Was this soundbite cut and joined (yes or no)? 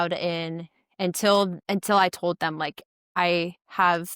yes